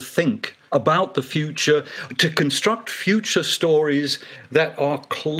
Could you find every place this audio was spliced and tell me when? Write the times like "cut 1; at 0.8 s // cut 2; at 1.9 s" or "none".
none